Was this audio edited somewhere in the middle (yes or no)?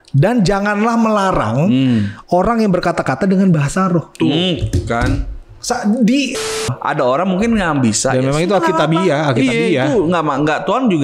yes